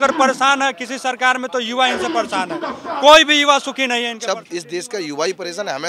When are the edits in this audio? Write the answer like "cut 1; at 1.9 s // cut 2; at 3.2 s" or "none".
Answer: cut 1; at 4.2 s